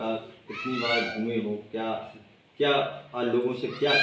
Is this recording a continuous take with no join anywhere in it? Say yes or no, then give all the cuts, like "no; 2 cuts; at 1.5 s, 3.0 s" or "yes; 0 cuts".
yes; 0 cuts